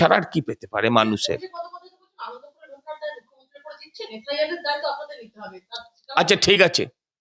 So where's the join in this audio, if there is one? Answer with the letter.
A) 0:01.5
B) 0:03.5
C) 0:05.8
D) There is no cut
D